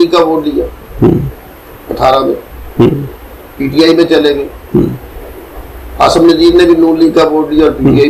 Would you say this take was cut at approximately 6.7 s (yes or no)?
no